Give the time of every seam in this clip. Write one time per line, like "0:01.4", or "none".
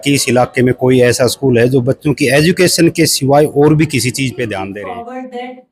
0:04.7